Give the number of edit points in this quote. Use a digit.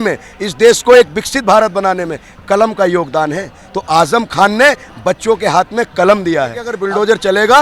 1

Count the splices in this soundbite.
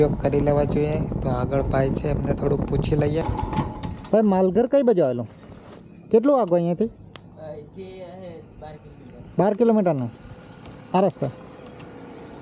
0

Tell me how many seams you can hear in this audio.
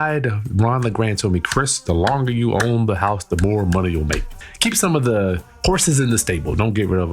1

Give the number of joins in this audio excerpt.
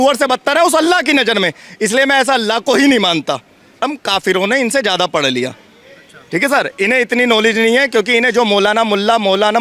1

